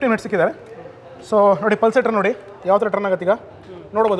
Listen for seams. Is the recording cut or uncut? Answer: uncut